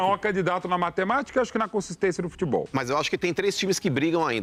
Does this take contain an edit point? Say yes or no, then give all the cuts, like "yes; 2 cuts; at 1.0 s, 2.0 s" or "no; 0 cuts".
no; 0 cuts